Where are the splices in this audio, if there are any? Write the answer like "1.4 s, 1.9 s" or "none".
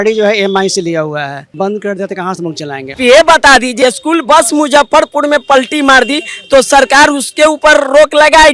1.5 s, 3.0 s, 3.8 s

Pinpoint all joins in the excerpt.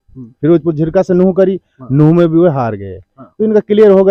none

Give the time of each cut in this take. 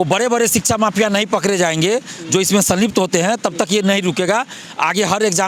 none

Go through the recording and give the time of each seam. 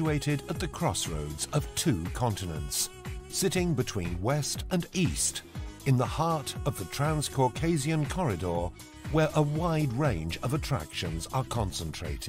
10.6 s

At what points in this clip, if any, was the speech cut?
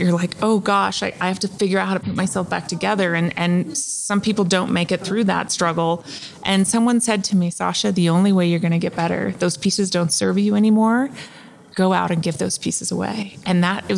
none

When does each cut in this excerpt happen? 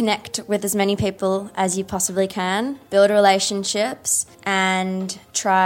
2.8 s, 4.8 s

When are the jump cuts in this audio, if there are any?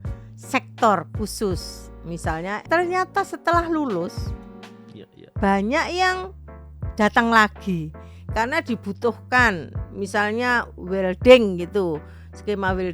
2.6 s

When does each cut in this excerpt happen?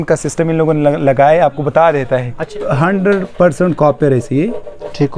2.5 s

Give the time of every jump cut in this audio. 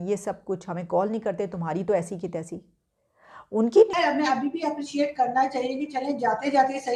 3.9 s

